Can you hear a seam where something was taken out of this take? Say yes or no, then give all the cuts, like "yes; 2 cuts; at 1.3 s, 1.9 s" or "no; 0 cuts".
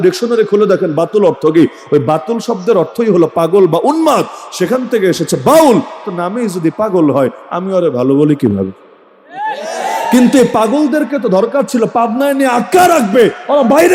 no; 0 cuts